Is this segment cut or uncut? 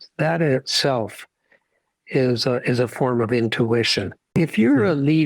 cut